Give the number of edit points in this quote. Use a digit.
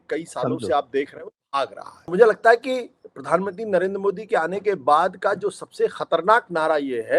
1